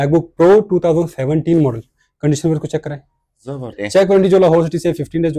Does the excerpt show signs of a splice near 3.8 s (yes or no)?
yes